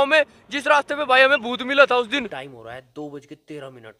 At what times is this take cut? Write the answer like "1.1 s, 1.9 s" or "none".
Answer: 2.1 s